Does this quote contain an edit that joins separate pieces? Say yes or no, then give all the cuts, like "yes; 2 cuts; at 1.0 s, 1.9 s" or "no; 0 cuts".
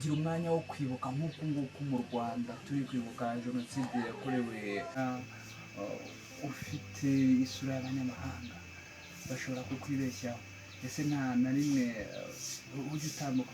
yes; 1 cut; at 5.0 s